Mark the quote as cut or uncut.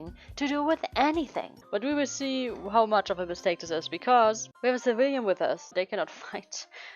cut